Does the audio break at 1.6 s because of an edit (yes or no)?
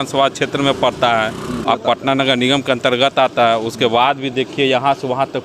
yes